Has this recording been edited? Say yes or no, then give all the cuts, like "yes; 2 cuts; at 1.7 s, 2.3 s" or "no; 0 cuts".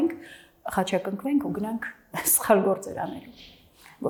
no; 0 cuts